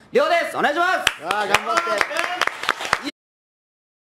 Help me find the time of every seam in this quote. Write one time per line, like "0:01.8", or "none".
none